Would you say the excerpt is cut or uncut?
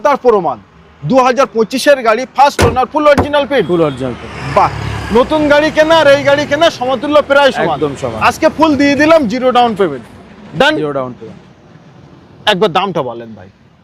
uncut